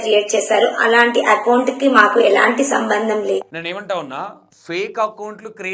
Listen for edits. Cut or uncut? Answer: uncut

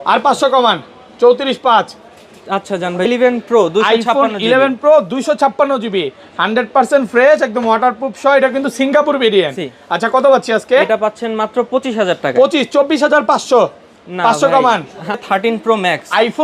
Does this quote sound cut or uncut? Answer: cut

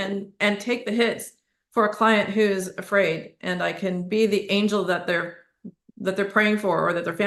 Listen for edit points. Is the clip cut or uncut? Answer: uncut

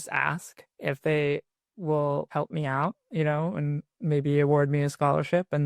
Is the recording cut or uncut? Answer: cut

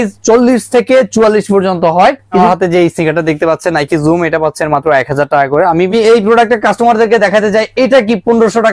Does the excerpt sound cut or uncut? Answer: cut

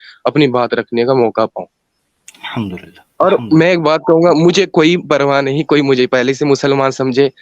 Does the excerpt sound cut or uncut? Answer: uncut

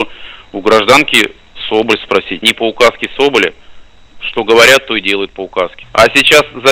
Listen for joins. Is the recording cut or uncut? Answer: cut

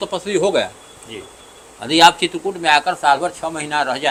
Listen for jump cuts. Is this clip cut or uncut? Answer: uncut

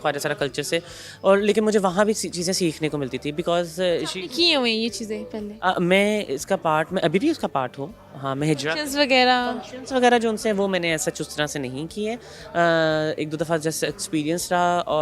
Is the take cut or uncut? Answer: uncut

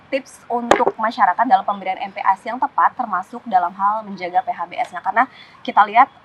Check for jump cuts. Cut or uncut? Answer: uncut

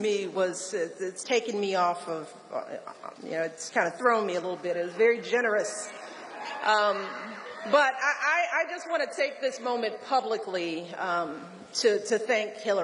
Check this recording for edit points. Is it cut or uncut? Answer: uncut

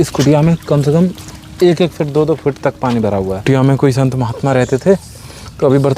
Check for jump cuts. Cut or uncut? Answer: cut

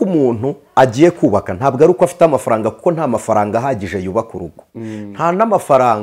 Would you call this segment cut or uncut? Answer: uncut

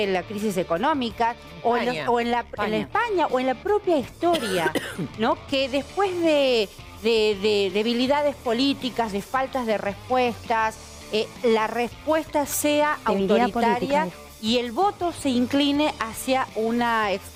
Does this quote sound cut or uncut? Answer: uncut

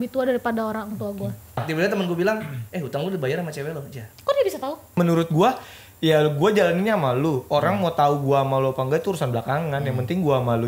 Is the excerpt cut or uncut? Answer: cut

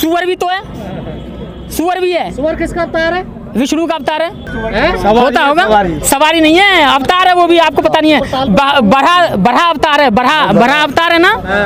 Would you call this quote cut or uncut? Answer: uncut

